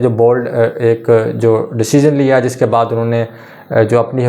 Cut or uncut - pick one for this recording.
uncut